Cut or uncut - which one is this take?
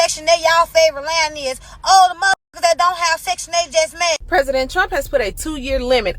cut